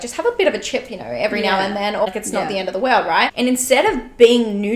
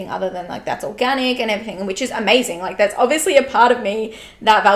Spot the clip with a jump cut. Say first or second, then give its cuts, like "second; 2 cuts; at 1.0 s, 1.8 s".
first; 2 cuts; at 2.1 s, 3.3 s